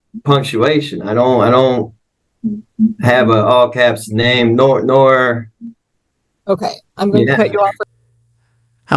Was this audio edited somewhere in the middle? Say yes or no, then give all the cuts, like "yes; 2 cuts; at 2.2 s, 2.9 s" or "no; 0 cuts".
no; 0 cuts